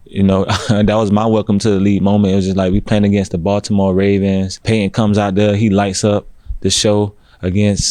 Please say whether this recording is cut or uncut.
cut